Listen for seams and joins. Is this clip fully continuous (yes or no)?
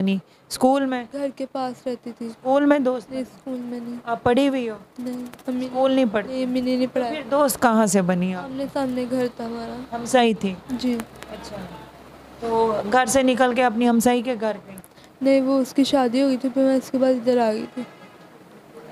yes